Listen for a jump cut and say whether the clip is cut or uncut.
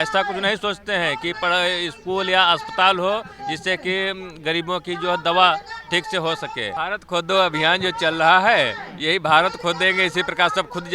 cut